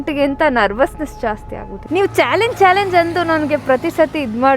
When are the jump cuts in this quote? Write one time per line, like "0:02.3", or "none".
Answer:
0:01.7